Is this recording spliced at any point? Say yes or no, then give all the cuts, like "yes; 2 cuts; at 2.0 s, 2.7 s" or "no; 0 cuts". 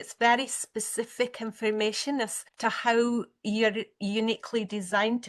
yes; 1 cut; at 2.4 s